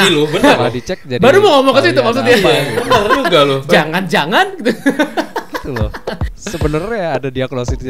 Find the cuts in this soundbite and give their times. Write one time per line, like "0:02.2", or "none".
0:06.5